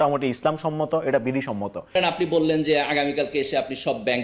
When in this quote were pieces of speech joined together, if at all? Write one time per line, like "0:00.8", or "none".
0:02.0